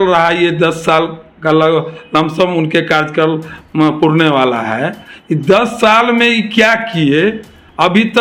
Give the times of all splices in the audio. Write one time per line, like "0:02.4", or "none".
none